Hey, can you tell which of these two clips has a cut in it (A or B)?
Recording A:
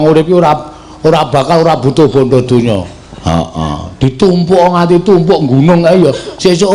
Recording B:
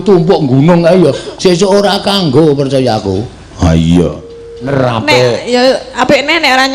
B